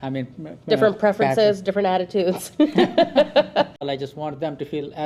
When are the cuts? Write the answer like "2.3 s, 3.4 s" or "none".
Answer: 3.8 s